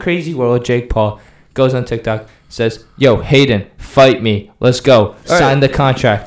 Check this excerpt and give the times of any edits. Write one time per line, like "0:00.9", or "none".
none